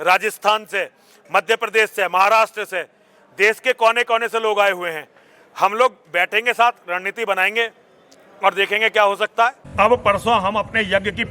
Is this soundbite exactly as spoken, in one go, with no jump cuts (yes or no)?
no